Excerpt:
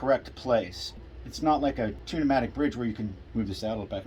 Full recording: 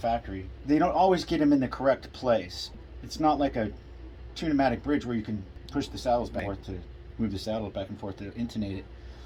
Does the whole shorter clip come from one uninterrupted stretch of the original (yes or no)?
no